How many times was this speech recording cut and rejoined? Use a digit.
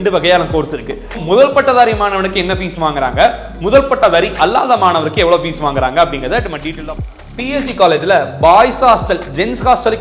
2